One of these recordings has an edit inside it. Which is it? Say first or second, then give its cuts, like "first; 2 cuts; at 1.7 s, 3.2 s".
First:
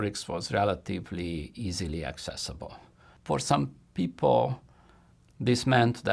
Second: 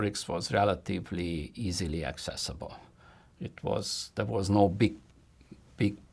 first; 1 cut; at 3.1 s